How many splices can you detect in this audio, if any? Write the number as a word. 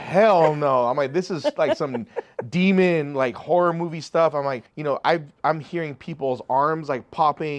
one